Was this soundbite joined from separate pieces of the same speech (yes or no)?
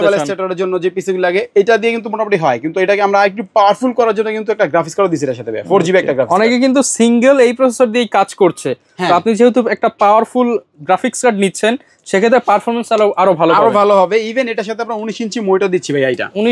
no